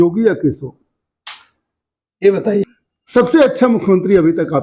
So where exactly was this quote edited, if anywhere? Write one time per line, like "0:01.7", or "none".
0:02.6